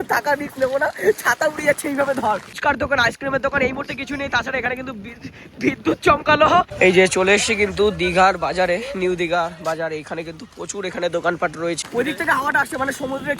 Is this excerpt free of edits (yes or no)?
no